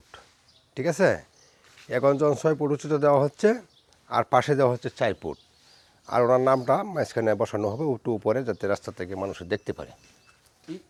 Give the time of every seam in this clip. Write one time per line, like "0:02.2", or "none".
none